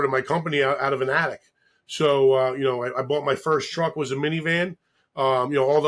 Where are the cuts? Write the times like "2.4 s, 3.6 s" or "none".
none